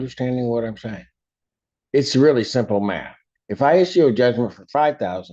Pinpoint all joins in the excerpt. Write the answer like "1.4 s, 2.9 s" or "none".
none